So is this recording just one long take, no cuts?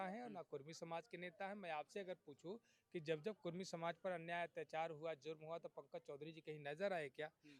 yes; 0 cuts

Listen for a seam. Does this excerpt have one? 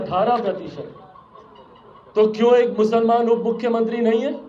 no; 0 cuts

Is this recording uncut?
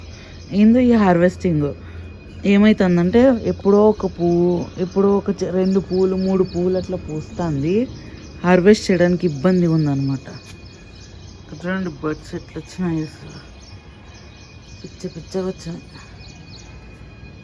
yes; 0 cuts

